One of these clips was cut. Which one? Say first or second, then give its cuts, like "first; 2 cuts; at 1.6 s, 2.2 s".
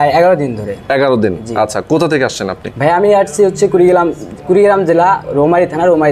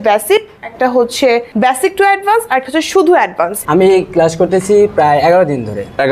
second; 2 cuts; at 1.5 s, 3.6 s